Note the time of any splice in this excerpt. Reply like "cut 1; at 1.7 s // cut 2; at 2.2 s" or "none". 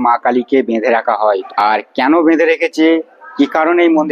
cut 1; at 1.4 s